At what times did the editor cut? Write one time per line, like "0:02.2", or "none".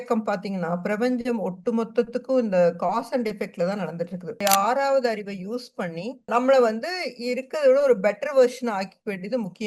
0:04.4